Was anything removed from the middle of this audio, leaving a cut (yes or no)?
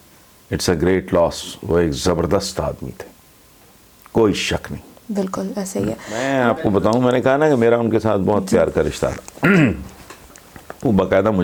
no